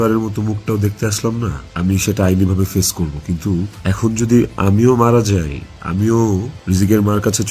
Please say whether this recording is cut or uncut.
cut